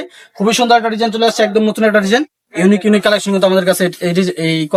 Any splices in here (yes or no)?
no